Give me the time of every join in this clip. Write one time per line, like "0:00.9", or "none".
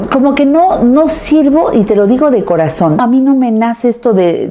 0:03.0

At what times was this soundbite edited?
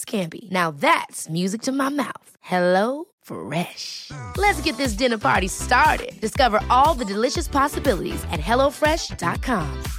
none

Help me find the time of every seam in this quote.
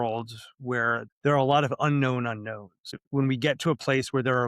0:01.1
0:02.9

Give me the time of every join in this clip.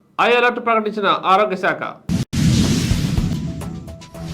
0:02.3
0:03.3

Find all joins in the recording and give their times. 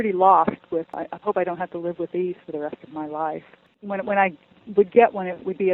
0:01.0
0:03.7

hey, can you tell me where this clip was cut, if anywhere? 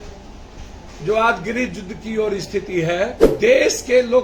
0:03.2

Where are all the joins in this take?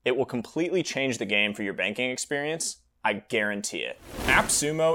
0:04.0

